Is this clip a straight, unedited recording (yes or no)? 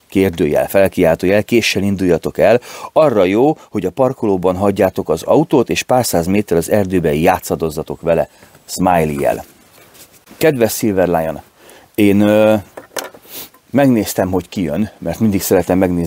yes